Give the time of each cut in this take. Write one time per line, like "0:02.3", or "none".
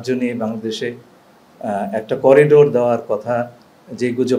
none